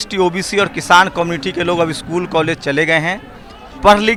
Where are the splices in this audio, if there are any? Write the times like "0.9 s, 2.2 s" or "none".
none